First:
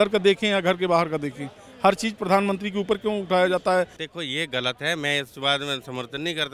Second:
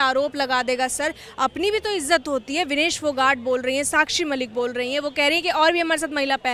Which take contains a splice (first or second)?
first